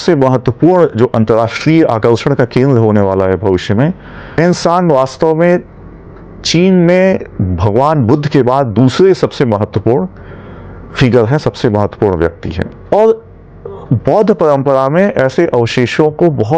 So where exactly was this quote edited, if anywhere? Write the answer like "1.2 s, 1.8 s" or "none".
4.4 s, 12.6 s